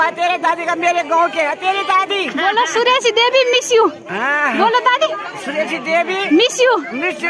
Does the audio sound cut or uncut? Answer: uncut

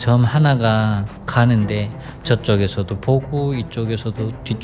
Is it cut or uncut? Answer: uncut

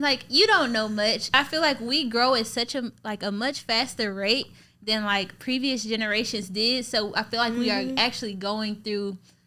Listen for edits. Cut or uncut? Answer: cut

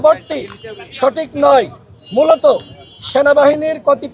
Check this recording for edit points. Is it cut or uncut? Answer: uncut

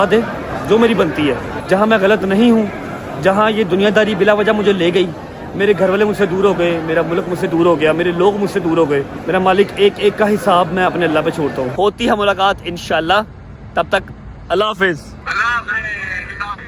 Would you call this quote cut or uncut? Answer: cut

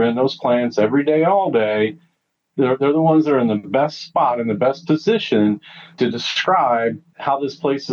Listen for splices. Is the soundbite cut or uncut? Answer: cut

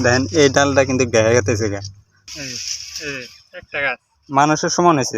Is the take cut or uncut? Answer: cut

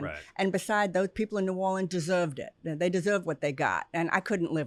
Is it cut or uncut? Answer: uncut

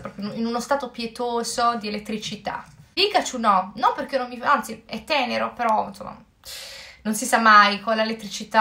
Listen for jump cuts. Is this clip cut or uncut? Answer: cut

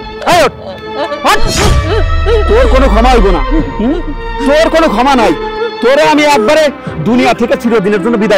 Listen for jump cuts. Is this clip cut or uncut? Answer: uncut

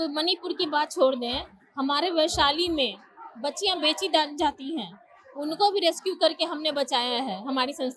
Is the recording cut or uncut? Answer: uncut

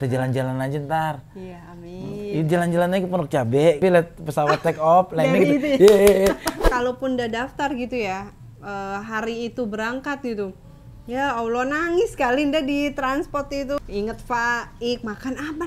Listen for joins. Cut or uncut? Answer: cut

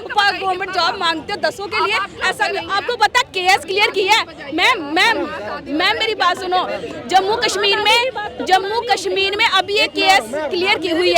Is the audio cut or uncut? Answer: uncut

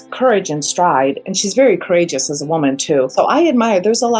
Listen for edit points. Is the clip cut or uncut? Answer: cut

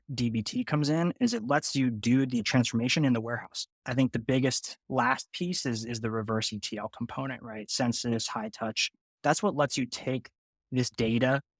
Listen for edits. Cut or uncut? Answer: cut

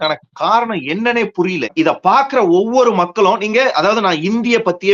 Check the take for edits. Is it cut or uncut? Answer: cut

